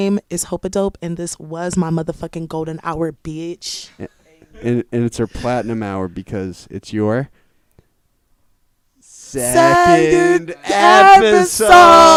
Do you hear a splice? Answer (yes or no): no